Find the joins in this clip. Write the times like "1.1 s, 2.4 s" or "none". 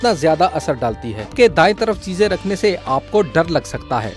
1.3 s

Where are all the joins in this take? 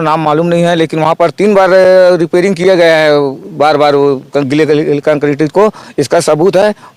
none

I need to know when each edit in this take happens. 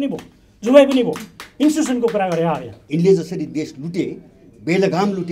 2.7 s

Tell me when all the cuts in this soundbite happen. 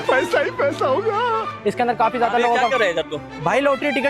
1.5 s

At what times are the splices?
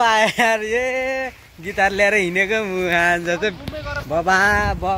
none

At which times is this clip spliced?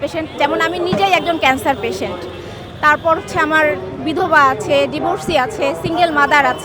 none

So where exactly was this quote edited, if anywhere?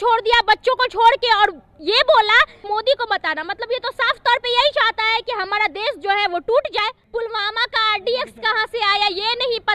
2.7 s, 7.0 s

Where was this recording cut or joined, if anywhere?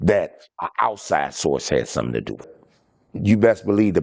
2.6 s

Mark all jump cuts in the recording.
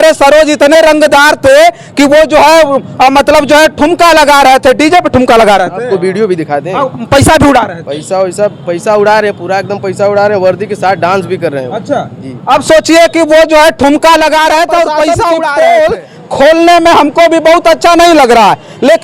15.5 s

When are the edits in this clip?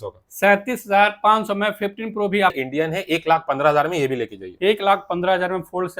2.5 s

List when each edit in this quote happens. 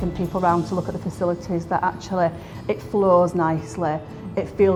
none

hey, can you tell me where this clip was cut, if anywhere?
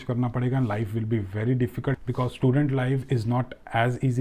2.0 s

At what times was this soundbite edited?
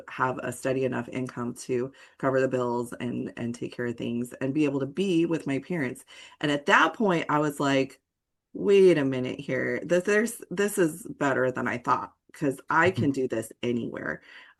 none

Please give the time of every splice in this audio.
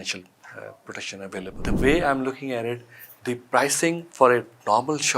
1.6 s

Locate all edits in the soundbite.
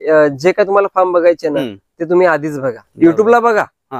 2.8 s

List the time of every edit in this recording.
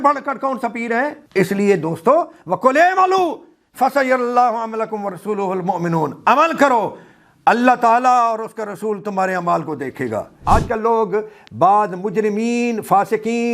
1.2 s, 10.4 s

